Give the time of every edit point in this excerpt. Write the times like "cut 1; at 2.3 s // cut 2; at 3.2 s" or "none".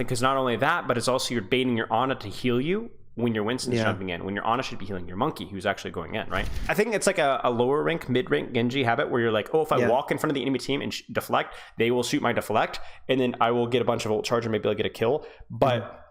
cut 1; at 6.7 s